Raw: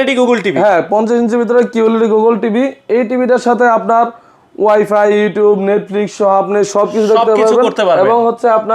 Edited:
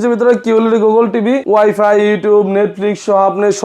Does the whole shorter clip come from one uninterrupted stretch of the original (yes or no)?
no